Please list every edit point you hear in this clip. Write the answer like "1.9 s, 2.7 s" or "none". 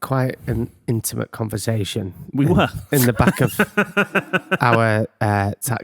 2.8 s